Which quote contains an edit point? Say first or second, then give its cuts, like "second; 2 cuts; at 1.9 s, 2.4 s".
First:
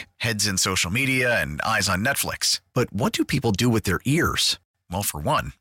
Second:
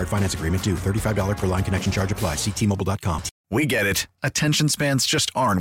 second; 1 cut; at 3.3 s